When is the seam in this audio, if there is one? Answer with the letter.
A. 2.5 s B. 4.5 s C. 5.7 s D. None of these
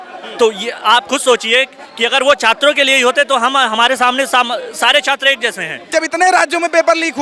C